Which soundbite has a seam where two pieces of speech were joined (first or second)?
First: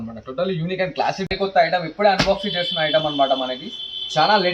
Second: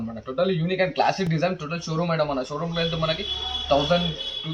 first